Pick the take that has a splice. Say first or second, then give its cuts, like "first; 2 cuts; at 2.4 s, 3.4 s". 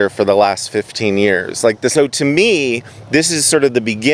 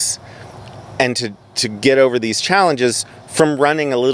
first; 1 cut; at 1.9 s